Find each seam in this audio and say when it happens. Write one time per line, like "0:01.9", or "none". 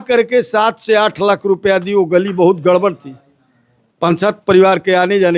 none